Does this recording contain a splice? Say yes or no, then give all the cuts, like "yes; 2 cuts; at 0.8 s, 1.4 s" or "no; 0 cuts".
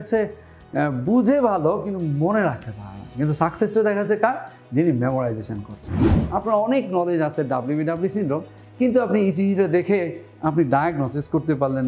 yes; 1 cut; at 6.2 s